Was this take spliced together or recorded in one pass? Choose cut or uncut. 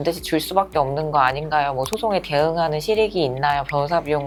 uncut